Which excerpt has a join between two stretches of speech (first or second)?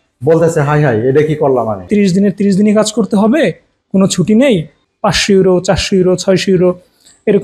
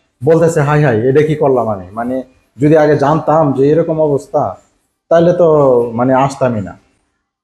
first